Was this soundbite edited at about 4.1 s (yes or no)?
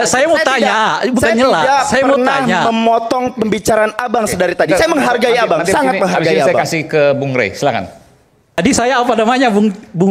no